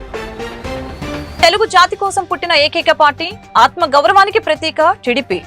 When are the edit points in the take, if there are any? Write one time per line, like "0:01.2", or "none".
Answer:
0:01.4